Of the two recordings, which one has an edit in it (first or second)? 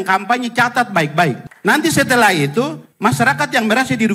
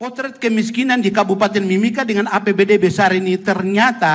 first